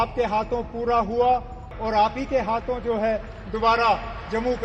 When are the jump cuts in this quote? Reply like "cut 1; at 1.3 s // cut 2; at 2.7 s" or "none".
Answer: cut 1; at 1.6 s